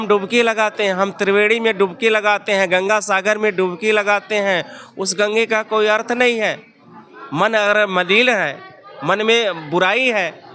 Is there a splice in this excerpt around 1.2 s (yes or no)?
no